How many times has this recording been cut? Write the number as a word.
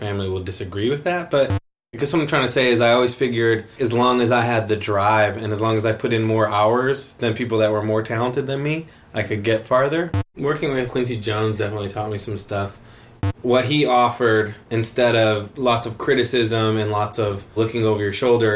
three